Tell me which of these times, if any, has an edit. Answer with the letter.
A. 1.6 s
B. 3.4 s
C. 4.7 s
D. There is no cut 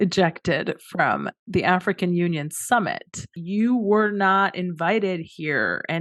B